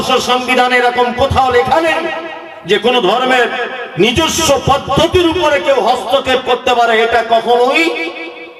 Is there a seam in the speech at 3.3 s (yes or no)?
no